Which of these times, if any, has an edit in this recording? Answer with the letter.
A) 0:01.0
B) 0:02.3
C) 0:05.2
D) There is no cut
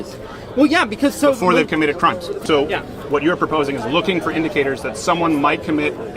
B